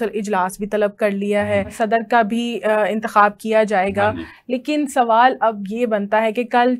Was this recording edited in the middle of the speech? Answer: yes; 1 cut; at 1.7 s

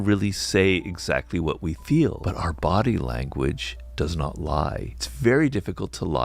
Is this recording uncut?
no; 2 cuts; at 2.2 s, 4.9 s

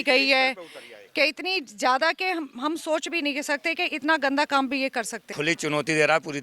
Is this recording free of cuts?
no; 1 cut; at 5.2 s

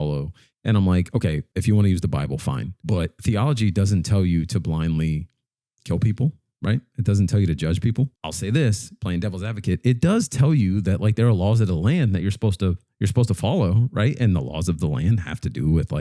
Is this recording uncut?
no; 3 cuts; at 1.5 s, 3.1 s, 8.2 s

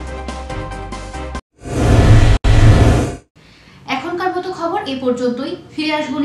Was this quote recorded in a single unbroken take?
yes; 0 cuts

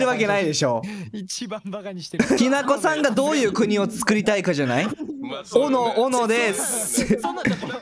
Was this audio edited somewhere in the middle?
yes; 1 cut; at 2.4 s

